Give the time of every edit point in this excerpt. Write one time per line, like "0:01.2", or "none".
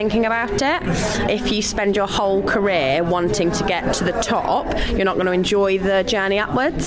0:01.3